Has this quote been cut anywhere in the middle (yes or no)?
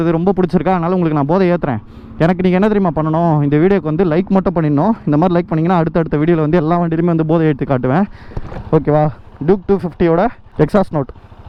no